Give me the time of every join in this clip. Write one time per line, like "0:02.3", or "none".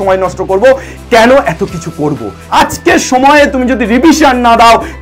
0:02.5